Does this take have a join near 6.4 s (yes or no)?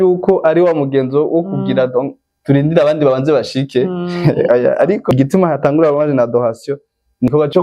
no